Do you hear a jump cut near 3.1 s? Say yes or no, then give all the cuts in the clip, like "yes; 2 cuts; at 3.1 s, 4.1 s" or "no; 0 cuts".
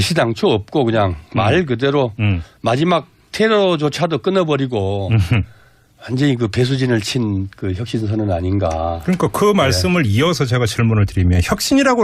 no; 1 cut; at 5.5 s